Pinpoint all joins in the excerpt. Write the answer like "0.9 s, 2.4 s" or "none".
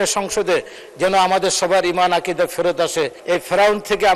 3.2 s